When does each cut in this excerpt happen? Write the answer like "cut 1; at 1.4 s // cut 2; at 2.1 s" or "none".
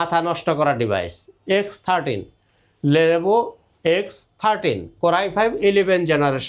none

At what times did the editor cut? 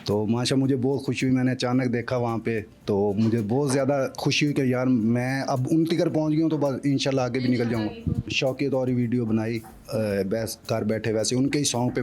cut 1; at 8.3 s

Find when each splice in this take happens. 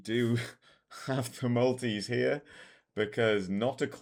none

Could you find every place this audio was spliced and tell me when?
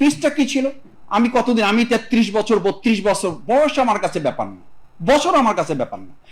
cut 1; at 0.9 s

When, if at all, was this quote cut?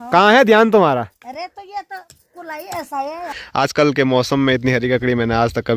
cut 1; at 3.4 s

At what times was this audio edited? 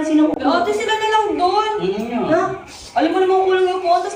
none

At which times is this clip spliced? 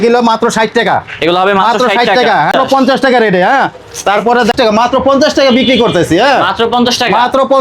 cut 1; at 2.5 s // cut 2; at 4.5 s

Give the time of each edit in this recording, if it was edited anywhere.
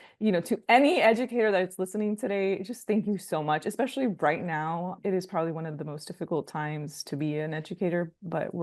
cut 1; at 5.0 s

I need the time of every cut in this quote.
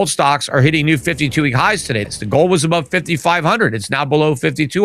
cut 1; at 2.1 s

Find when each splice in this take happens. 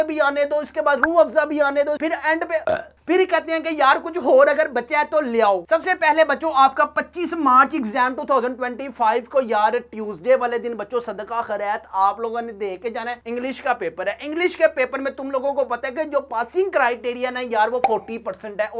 none

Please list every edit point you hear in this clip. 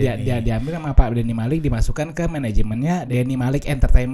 cut 1; at 3.1 s

